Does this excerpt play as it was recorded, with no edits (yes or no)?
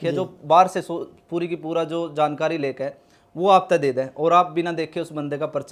yes